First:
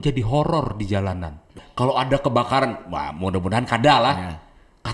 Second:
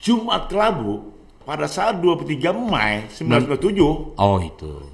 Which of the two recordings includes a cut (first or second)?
first